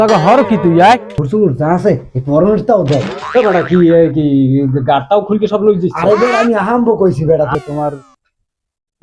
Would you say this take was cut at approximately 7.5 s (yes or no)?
yes